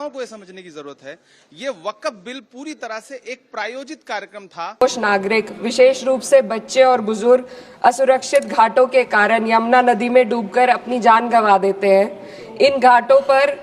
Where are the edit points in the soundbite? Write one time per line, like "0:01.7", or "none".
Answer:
0:04.8